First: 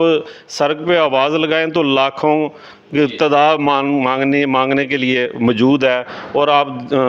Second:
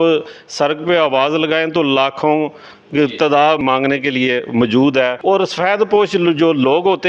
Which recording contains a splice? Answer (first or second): second